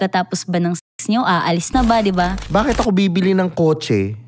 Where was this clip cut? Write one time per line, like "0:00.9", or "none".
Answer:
0:02.4